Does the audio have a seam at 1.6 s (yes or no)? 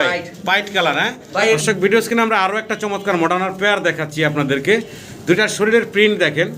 yes